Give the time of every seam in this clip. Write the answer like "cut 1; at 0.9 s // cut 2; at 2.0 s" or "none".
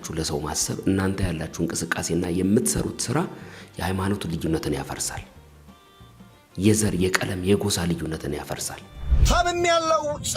cut 1; at 9.1 s

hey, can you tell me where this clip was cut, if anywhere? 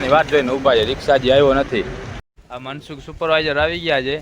cut 1; at 2.2 s

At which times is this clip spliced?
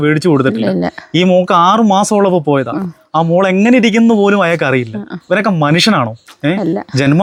none

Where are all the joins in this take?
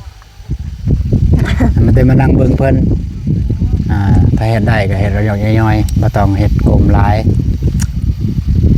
none

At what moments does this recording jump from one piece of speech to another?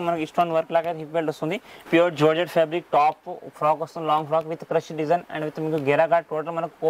cut 1; at 1.9 s

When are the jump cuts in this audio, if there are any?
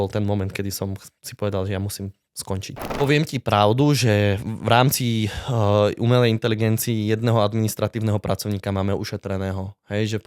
cut 1; at 2.9 s

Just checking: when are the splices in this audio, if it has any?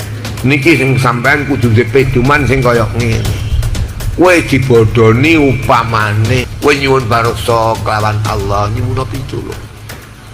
cut 1; at 6.5 s

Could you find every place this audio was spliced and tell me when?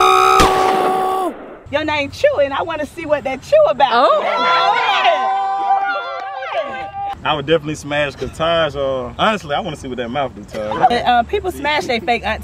cut 1; at 1.5 s // cut 2; at 7.1 s // cut 3; at 9.1 s // cut 4; at 10.9 s

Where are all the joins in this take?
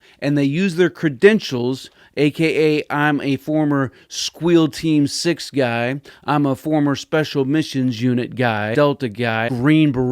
cut 1; at 9.1 s

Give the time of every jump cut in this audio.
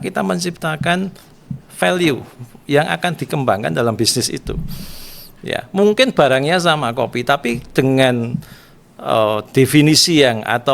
none

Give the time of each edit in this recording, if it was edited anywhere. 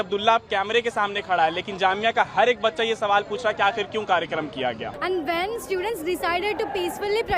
cut 1; at 4.9 s

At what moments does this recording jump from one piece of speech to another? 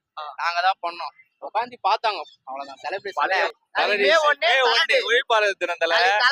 cut 1; at 3.5 s

